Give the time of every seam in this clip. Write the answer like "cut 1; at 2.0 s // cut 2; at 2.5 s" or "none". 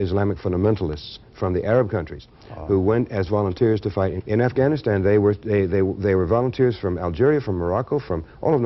cut 1; at 4.1 s